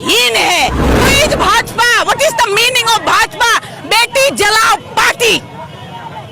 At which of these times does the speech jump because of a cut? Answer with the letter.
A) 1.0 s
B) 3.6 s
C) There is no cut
A